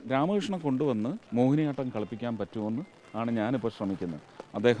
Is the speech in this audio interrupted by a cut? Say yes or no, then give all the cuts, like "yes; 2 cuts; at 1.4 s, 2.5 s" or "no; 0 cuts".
yes; 1 cut; at 1.2 s